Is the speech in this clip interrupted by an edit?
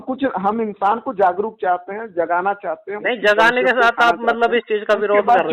no; 0 cuts

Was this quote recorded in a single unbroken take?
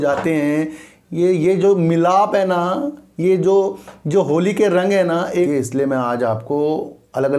no; 1 cut; at 5.4 s

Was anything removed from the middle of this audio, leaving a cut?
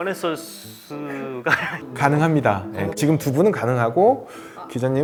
no; 0 cuts

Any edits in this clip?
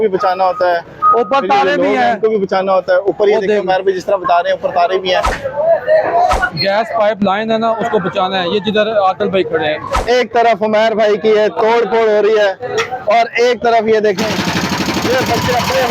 yes; 2 cuts; at 6.4 s, 9.9 s

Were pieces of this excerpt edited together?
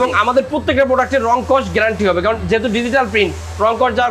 no; 0 cuts

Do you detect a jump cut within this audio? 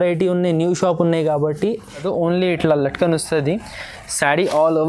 yes; 1 cut; at 2.1 s

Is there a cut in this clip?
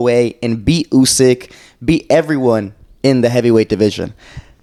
no; 0 cuts

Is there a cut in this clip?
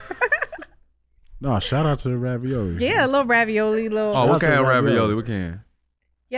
no; 0 cuts

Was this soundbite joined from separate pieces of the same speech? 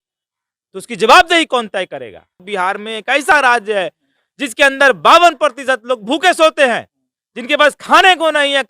yes; 1 cut; at 2.4 s

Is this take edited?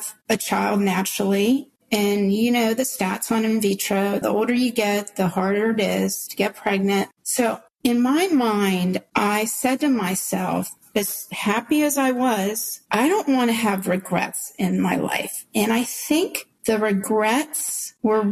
no; 0 cuts

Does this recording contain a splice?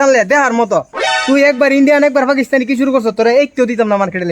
no; 0 cuts

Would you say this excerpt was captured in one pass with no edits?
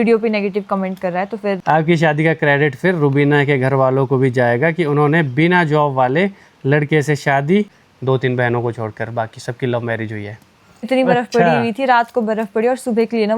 no; 3 cuts; at 1.6 s, 7.8 s, 10.9 s

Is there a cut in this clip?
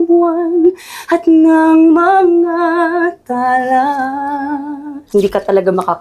yes; 1 cut; at 5.1 s

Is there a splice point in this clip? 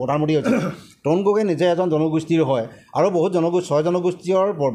no; 0 cuts

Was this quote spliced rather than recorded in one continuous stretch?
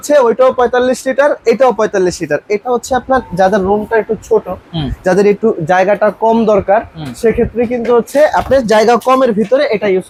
no; 0 cuts

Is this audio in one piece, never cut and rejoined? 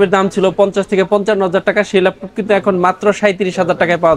yes; 0 cuts

